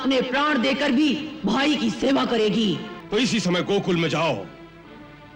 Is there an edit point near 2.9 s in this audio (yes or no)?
yes